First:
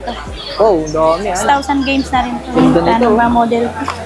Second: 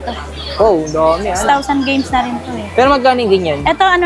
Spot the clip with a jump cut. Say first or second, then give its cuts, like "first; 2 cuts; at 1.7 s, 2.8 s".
first; 1 cut; at 2.5 s